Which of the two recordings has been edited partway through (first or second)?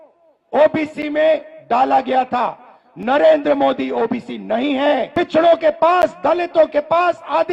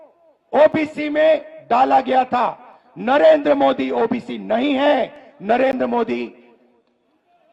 first